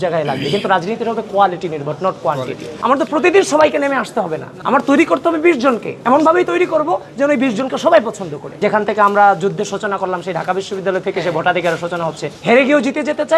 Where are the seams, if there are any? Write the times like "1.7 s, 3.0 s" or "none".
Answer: 2.7 s, 8.4 s, 12.3 s